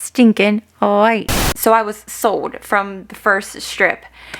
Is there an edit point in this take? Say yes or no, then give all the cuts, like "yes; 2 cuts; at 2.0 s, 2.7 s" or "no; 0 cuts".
yes; 1 cut; at 1.5 s